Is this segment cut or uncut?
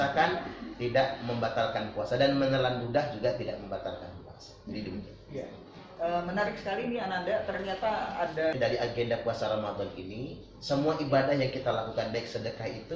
cut